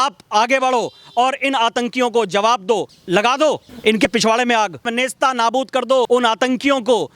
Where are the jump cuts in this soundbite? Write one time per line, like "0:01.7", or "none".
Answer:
0:02.9
0:04.0
0:04.9
0:06.1